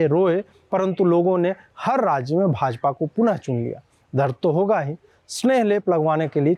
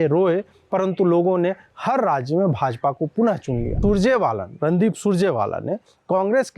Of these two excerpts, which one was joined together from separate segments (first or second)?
second